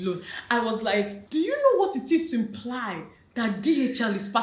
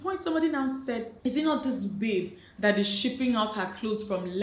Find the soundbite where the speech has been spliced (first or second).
first